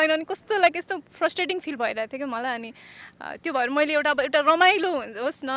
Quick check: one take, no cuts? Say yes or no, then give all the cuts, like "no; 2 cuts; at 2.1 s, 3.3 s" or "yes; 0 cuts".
yes; 0 cuts